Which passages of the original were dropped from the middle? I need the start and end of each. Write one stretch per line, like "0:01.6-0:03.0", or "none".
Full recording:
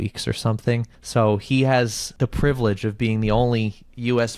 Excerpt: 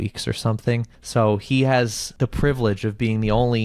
none